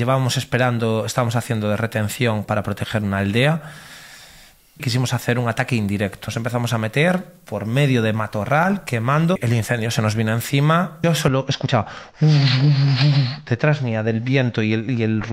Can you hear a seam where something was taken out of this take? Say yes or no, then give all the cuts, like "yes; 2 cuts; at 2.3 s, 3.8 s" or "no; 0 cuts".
yes; 4 cuts; at 4.9 s, 6.2 s, 9.4 s, 11.0 s